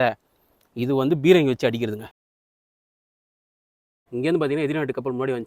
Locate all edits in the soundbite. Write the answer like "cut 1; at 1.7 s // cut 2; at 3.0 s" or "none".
none